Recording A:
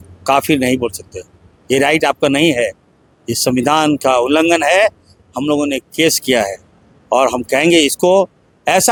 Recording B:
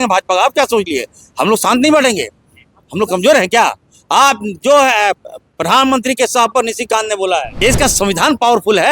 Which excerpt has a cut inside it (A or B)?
B